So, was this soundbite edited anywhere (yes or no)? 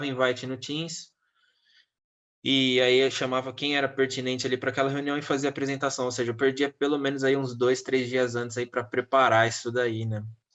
no